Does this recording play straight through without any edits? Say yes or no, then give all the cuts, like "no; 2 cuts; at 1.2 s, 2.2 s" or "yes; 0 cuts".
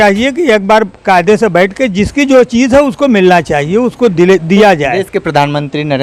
yes; 0 cuts